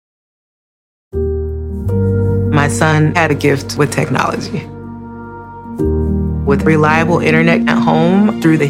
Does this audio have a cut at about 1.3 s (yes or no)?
no